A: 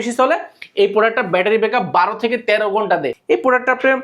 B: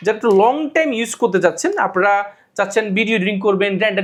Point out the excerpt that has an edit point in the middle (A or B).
A